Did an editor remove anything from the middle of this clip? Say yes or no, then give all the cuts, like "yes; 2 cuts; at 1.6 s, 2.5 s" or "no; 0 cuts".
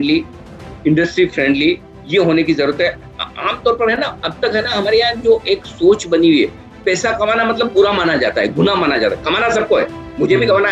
no; 0 cuts